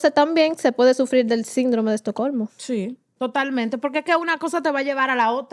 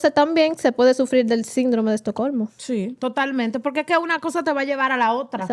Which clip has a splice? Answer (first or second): second